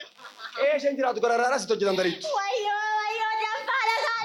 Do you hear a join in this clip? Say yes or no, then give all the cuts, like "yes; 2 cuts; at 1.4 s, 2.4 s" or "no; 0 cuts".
no; 0 cuts